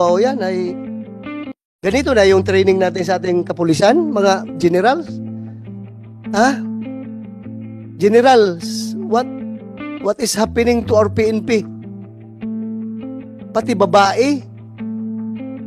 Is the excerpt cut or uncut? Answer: cut